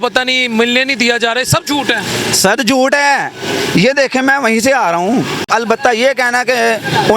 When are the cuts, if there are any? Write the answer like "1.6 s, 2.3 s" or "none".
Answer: 5.5 s